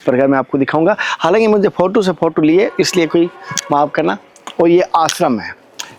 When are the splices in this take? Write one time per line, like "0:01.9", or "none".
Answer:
none